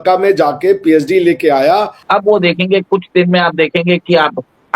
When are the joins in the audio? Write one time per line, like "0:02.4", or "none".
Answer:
0:02.0